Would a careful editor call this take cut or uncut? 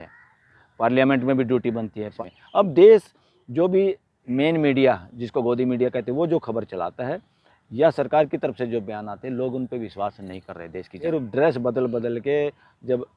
cut